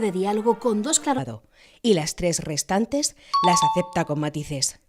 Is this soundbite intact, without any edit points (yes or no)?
yes